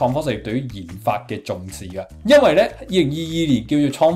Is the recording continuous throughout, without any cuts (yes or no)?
yes